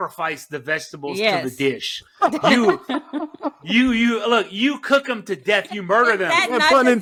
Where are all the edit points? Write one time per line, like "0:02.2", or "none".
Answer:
none